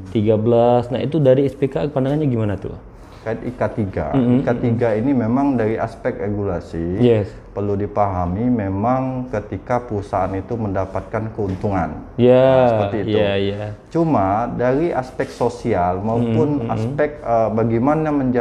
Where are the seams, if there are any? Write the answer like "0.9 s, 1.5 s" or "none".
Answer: 3.2 s